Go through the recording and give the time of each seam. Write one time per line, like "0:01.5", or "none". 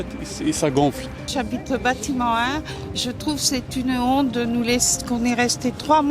0:01.3